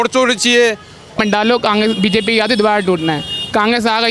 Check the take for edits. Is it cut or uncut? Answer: cut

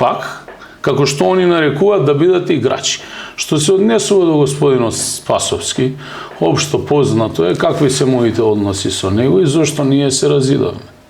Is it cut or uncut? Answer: uncut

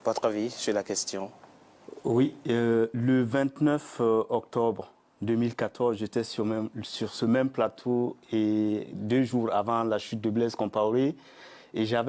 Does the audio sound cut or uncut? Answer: cut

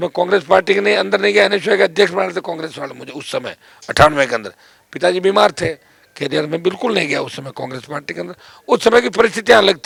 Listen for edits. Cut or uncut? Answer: uncut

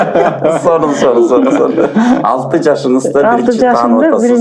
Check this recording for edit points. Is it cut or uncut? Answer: uncut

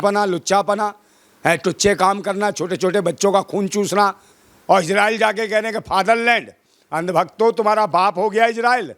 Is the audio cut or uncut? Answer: cut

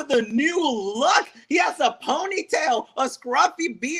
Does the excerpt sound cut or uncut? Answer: uncut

